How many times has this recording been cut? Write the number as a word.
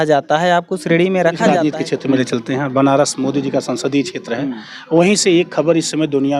one